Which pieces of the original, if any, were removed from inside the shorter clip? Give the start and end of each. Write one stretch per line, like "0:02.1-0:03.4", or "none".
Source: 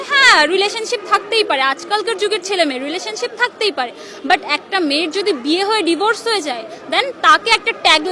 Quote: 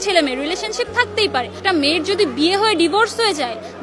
0:04.0-0:04.6

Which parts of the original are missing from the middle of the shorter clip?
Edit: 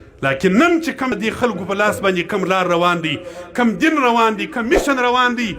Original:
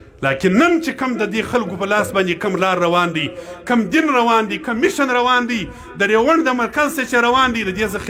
0:01.1-0:01.3

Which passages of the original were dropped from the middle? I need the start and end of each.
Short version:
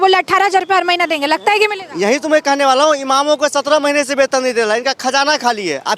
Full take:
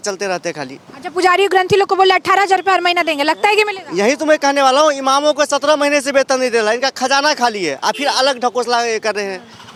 none

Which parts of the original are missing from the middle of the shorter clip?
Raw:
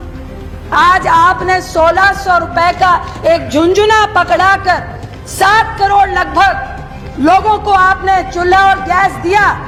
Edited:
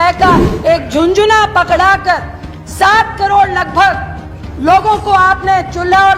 none

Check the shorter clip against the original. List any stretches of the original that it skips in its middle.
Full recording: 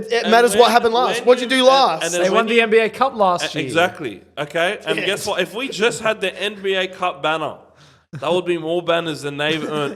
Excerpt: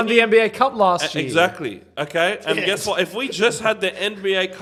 none

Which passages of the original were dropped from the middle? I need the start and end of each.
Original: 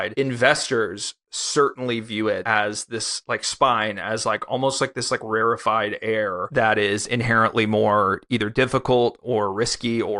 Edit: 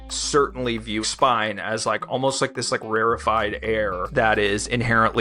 0:02.2-0:03.4

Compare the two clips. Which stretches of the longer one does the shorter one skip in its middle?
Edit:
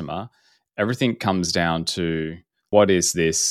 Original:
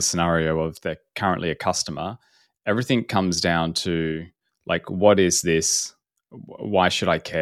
0:04.5-0:04.9

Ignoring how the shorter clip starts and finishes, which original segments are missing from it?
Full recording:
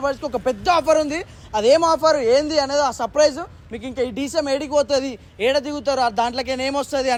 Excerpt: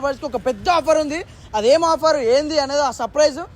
none

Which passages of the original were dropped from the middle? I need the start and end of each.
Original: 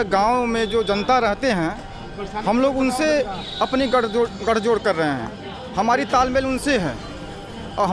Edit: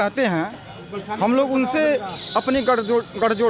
none

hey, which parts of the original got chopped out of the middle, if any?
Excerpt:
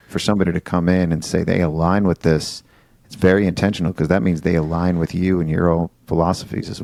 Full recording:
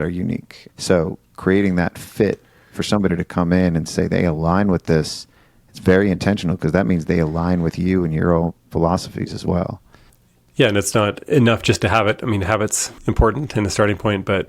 none

